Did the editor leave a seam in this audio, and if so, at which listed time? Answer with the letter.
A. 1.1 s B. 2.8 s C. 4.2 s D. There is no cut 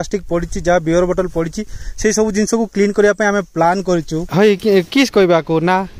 C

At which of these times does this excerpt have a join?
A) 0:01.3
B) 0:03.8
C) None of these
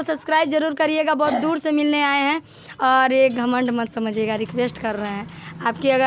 C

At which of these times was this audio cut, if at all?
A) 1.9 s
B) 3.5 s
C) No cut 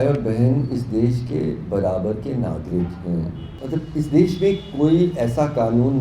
B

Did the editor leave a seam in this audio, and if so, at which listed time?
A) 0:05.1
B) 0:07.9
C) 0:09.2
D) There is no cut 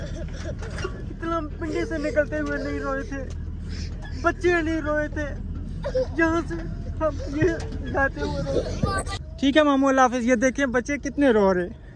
C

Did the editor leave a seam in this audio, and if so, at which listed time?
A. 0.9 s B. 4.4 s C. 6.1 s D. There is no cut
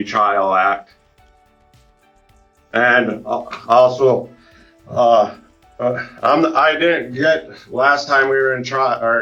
D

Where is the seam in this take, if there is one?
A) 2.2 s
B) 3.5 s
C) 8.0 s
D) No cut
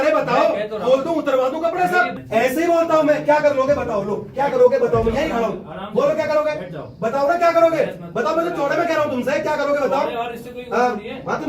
A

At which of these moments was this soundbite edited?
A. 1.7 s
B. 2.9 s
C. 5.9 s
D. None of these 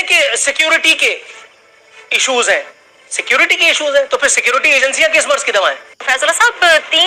C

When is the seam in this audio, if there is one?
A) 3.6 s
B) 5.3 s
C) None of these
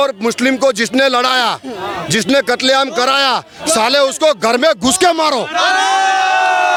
C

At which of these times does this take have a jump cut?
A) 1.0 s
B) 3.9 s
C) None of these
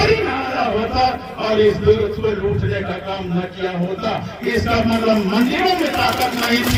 C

